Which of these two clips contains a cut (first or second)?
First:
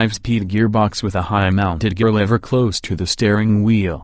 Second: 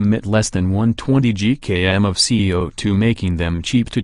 first